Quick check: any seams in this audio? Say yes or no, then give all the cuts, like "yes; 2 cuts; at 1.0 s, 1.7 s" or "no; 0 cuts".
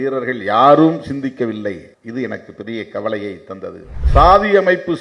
yes; 1 cut; at 3.9 s